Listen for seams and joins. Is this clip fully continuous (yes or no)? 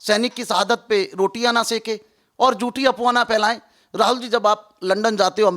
yes